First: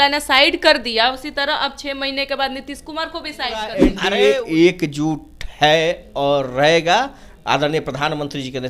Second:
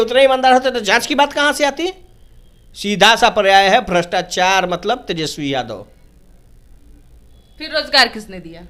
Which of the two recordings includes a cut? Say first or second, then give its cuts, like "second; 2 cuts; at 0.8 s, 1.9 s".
first; 1 cut; at 3.9 s